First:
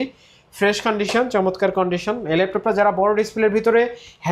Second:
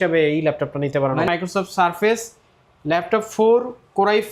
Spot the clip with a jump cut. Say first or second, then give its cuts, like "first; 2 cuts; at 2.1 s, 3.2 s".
second; 1 cut; at 1.3 s